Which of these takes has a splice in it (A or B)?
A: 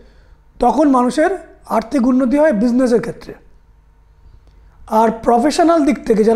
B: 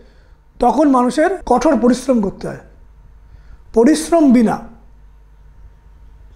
B